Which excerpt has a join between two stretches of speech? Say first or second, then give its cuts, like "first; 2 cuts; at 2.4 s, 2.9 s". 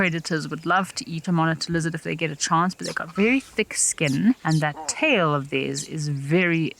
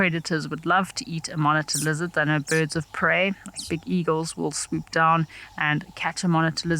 first; 2 cuts; at 1.2 s, 4.4 s